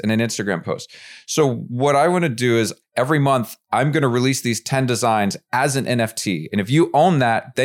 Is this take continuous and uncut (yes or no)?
no